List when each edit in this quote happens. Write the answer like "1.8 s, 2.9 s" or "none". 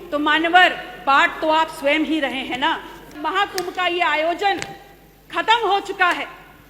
3.2 s